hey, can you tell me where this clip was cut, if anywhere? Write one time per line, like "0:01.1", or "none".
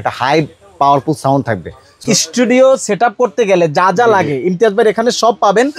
0:02.0